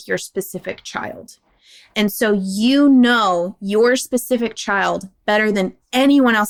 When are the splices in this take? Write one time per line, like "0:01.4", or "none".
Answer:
none